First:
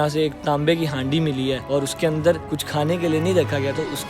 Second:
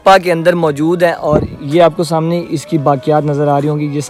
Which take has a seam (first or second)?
first